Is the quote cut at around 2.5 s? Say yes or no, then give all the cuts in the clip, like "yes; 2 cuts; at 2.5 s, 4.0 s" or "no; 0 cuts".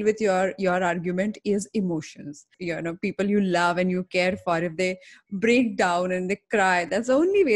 yes; 1 cut; at 2.5 s